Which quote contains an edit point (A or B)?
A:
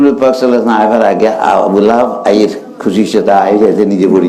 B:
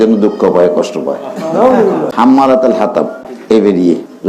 B